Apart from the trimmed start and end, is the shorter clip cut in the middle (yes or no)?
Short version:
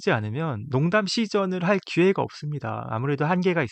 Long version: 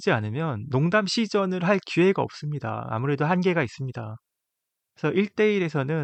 no